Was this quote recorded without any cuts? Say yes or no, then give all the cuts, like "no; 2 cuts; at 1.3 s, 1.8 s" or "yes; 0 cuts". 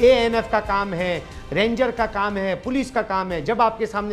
yes; 0 cuts